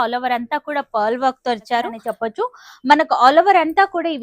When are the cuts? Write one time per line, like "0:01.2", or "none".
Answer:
0:02.0